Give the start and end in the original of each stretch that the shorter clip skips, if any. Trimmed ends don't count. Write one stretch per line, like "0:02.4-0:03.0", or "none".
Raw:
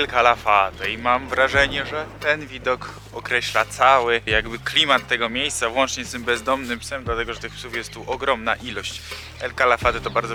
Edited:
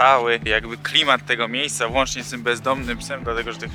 none